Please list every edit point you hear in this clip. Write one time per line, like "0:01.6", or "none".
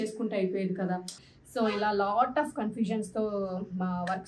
0:01.1